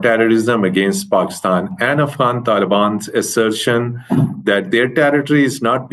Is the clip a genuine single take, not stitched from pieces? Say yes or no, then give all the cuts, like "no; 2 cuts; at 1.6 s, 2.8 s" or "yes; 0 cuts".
yes; 0 cuts